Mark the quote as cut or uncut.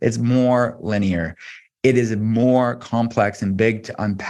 uncut